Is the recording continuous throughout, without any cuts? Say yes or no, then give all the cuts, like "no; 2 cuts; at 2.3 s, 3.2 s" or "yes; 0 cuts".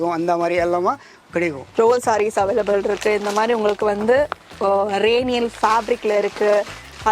no; 1 cut; at 1.6 s